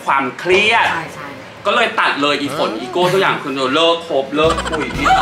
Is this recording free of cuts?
yes; 0 cuts

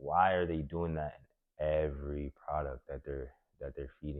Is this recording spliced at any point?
no; 0 cuts

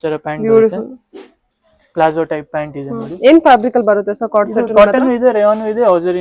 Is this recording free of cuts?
yes; 0 cuts

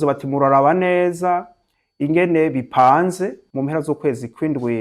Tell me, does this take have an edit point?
yes; 1 cut; at 3.4 s

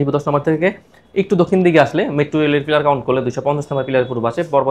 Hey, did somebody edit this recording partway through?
no; 0 cuts

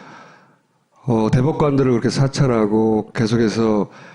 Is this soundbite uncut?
yes; 0 cuts

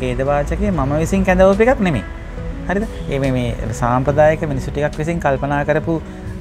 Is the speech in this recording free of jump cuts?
yes; 0 cuts

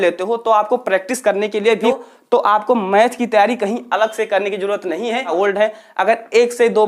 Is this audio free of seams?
no; 2 cuts; at 1.8 s, 5.3 s

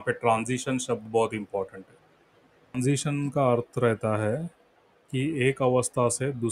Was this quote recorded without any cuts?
no; 1 cut; at 2.8 s

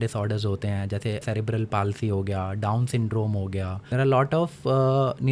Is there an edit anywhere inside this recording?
yes; 2 cuts; at 1.2 s, 3.8 s

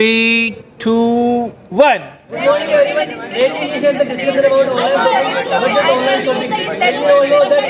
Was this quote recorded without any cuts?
yes; 0 cuts

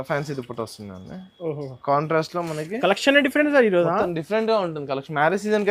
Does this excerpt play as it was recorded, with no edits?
yes; 0 cuts

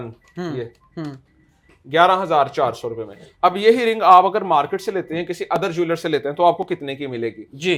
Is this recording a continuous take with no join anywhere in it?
yes; 0 cuts

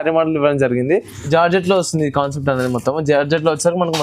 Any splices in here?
yes; 1 cut; at 1.2 s

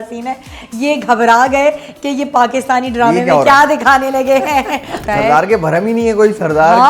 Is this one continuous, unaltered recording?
no; 1 cut; at 4.9 s

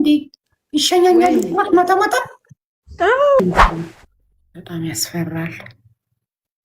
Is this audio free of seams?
no; 1 cut; at 3.4 s

